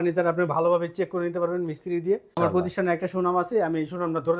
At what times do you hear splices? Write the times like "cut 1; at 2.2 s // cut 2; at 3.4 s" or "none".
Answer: cut 1; at 2.4 s